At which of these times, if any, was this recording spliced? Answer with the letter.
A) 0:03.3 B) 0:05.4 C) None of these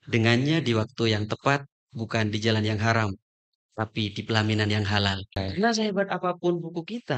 B